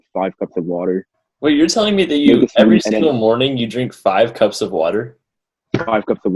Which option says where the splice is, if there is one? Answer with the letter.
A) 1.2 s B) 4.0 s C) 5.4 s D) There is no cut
A